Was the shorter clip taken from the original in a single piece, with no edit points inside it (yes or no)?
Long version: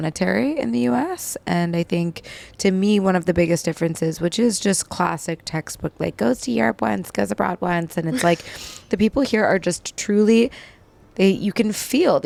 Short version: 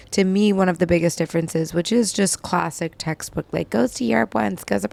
yes